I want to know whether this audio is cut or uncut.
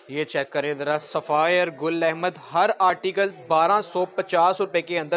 uncut